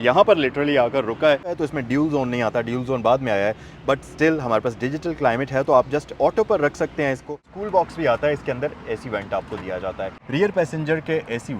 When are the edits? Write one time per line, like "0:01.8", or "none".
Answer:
0:01.5
0:07.4
0:10.1